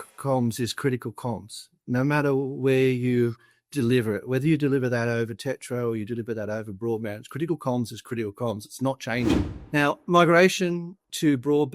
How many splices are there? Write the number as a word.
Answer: one